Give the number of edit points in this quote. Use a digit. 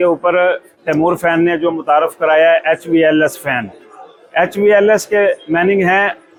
0